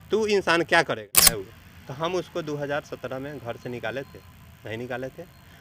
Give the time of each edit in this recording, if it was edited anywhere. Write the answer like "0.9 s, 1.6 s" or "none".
1.2 s